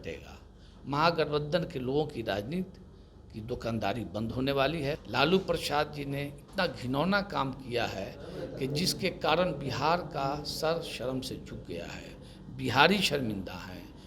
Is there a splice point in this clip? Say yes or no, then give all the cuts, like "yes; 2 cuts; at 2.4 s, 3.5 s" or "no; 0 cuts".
yes; 1 cut; at 5.0 s